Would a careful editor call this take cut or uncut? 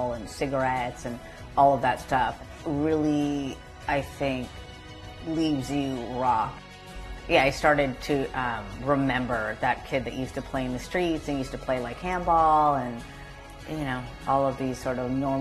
cut